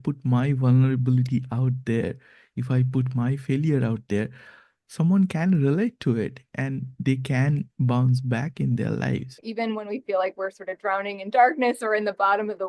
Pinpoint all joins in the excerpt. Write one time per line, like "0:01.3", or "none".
0:09.4